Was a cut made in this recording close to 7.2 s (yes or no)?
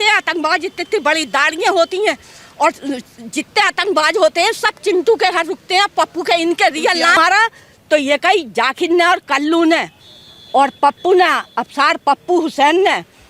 yes